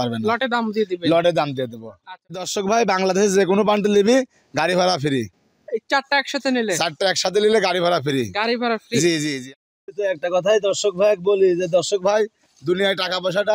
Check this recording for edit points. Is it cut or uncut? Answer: cut